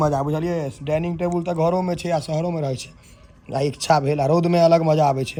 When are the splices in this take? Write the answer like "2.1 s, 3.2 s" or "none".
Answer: none